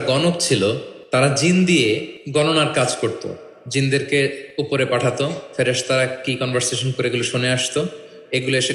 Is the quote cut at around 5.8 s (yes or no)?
no